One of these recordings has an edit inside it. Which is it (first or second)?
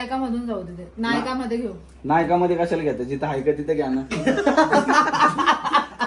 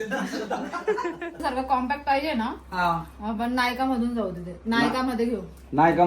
second